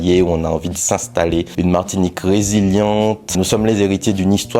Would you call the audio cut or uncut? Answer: cut